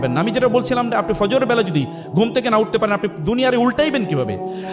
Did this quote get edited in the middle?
no; 0 cuts

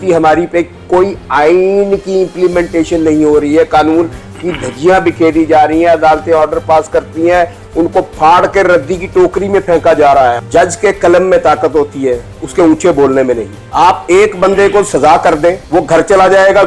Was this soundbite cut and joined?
yes; 3 cuts; at 10.4 s, 13.6 s, 15.6 s

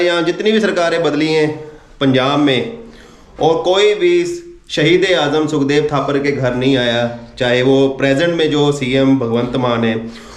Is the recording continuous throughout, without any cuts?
yes; 0 cuts

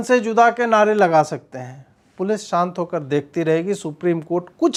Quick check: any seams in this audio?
no; 0 cuts

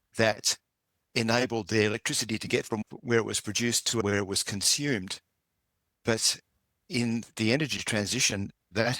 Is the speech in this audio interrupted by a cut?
yes; 2 cuts; at 2.8 s, 4.0 s

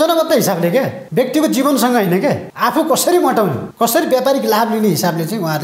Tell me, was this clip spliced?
yes; 3 cuts; at 1.0 s, 2.5 s, 3.6 s

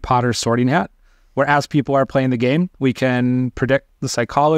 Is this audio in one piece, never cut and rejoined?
yes; 0 cuts

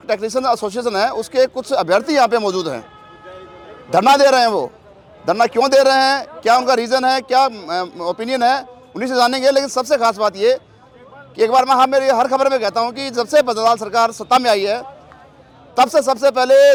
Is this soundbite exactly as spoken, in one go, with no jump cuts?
yes; 0 cuts

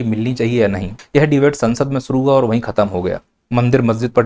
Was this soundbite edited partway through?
yes; 1 cut; at 0.9 s

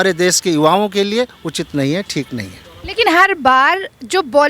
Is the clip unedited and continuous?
yes; 0 cuts

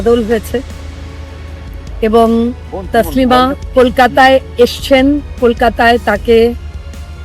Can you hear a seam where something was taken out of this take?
yes; 1 cut; at 3.6 s

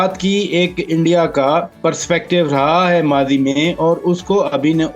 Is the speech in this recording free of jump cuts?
no; 1 cut; at 1.7 s

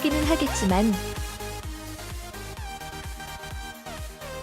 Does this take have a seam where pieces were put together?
yes; 1 cut; at 1.0 s

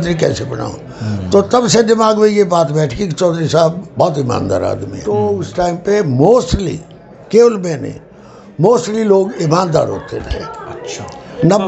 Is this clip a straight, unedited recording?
no; 1 cut; at 4.9 s

